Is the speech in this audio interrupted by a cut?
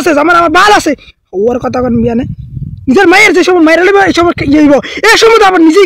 no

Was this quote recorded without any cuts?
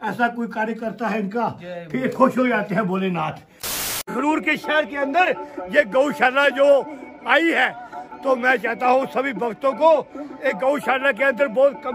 no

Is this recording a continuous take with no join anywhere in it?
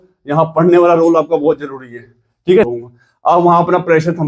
no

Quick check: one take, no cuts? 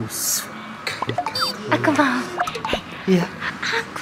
no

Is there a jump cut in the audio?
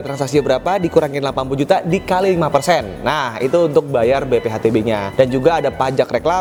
no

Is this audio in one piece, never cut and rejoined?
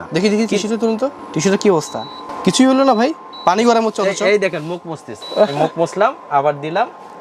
yes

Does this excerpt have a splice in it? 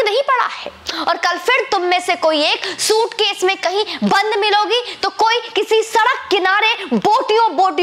no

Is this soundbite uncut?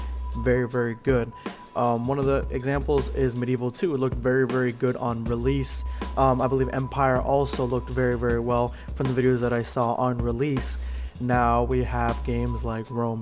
yes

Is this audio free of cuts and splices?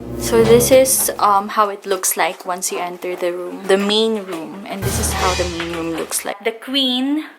no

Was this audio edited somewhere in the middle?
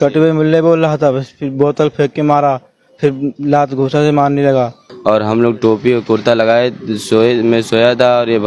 yes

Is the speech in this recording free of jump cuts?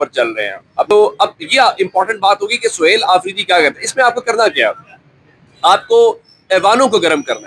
no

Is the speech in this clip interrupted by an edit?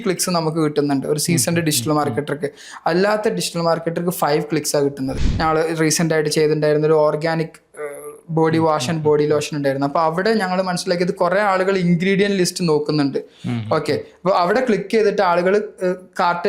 yes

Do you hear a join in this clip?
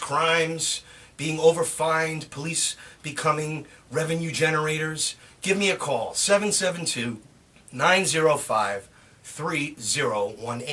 no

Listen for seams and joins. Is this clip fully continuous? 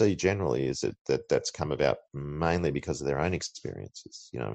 yes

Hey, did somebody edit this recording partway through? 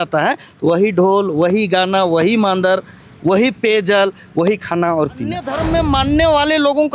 yes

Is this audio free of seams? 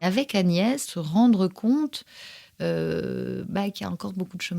no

